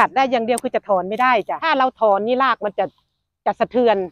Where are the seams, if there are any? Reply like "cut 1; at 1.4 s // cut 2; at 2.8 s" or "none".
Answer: cut 1; at 1.6 s